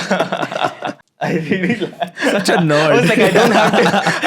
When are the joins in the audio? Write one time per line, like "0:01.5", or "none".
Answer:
0:00.9